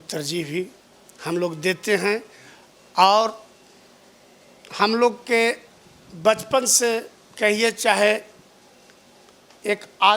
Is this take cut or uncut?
uncut